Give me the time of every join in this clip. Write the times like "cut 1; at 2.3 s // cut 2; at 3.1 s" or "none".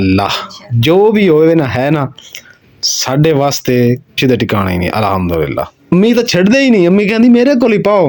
cut 1; at 4.2 s // cut 2; at 5.8 s